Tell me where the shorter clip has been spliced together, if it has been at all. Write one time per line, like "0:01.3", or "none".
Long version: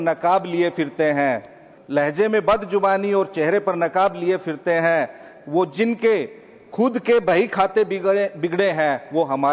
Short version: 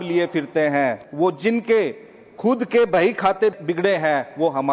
0:01.0
0:03.6